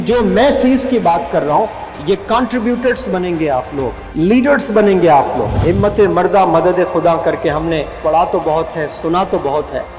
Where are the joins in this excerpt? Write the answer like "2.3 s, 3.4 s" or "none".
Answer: 4.0 s, 5.5 s